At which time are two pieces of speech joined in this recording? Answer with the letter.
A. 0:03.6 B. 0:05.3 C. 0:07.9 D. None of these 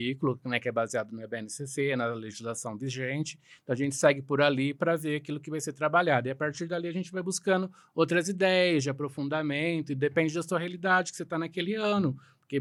D